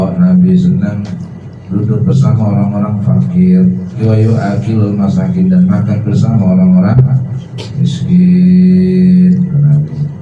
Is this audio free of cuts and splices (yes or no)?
no